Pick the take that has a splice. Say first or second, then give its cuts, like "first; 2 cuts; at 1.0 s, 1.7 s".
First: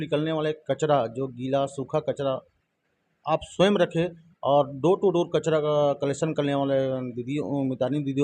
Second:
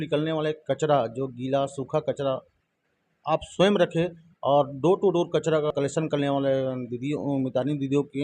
second; 1 cut; at 5.7 s